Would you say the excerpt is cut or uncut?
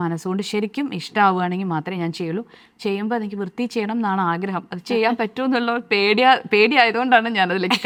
uncut